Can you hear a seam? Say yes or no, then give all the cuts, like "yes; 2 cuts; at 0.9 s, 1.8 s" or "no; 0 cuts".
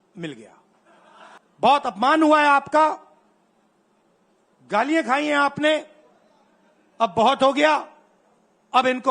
yes; 1 cut; at 1.3 s